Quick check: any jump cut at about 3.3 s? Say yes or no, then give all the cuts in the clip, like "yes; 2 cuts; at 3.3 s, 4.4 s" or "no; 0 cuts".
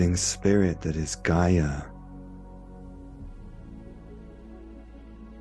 no; 1 cut; at 2.1 s